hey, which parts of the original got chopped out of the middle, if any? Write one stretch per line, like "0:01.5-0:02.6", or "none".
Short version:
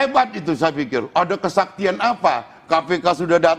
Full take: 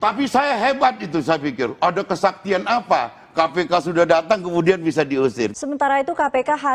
none